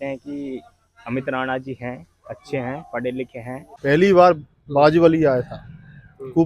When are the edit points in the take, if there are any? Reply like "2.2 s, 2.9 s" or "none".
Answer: 3.6 s